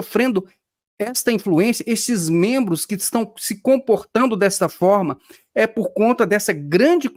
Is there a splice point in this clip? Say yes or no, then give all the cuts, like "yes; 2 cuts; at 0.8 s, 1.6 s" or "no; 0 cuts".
no; 0 cuts